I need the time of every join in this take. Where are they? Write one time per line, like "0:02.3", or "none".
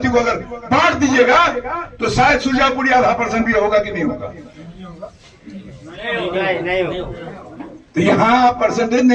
none

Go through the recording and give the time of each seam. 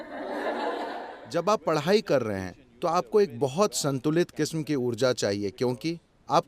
0:01.1

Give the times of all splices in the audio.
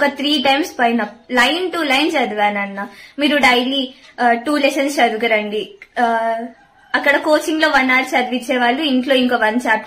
none

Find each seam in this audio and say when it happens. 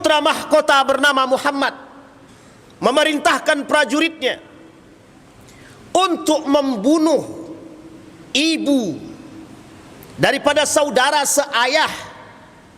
none

